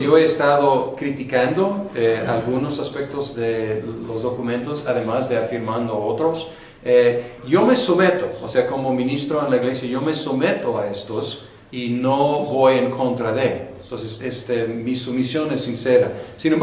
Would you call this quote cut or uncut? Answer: uncut